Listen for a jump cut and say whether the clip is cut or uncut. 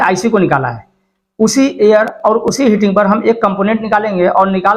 uncut